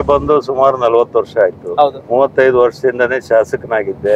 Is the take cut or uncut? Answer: uncut